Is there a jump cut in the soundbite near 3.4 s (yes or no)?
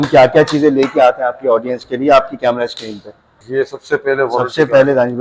yes